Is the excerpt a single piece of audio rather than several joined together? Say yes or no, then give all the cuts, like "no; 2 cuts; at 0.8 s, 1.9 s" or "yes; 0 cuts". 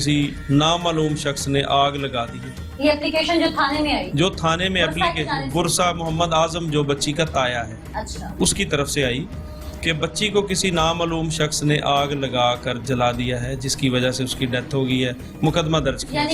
yes; 0 cuts